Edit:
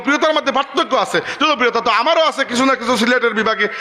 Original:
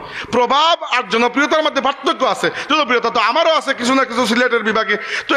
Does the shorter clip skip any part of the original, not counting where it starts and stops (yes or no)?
no